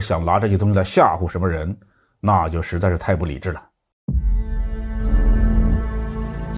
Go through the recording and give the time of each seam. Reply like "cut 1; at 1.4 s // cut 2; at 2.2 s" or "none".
cut 1; at 3.9 s